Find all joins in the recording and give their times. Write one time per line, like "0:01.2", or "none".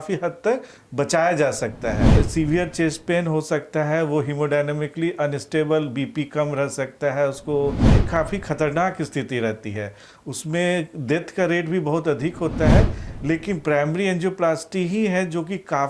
0:02.1
0:08.0